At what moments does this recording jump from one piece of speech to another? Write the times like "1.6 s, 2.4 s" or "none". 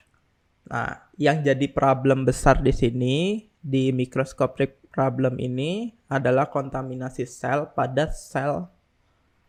none

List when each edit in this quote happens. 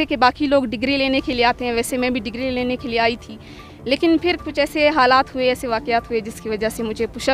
none

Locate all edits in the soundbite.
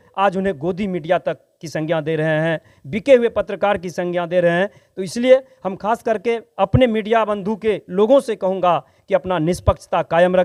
none

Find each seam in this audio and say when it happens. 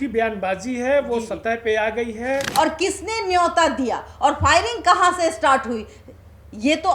2.5 s

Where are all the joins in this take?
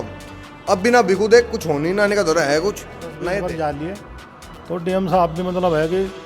3.2 s

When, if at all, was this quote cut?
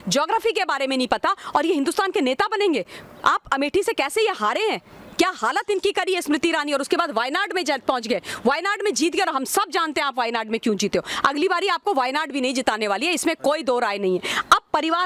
none

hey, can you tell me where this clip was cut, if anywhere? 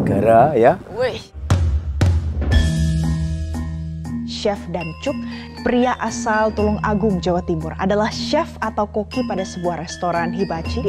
1.2 s

